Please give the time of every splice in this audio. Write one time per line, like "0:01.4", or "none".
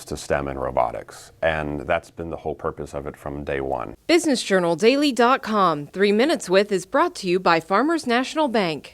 0:03.9